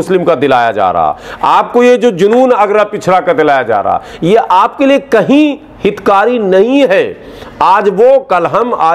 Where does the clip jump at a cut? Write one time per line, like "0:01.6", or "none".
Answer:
none

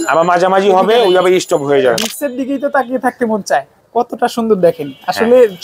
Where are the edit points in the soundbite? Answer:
0:02.0
0:03.8

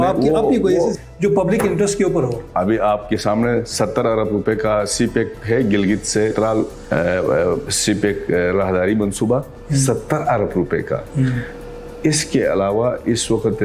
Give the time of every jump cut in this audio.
none

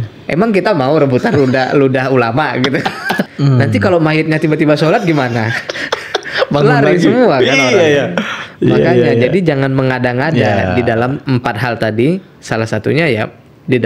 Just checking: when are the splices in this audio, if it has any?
0:03.3
0:11.2

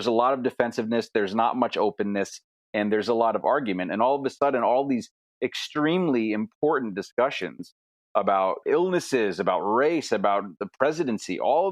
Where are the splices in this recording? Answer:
0:08.6

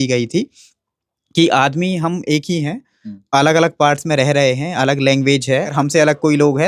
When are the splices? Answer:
0:05.7

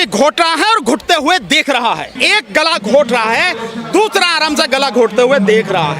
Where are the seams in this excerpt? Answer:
0:02.1

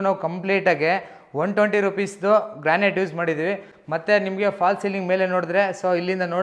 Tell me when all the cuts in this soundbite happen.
none

